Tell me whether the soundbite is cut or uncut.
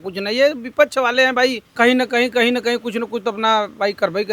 cut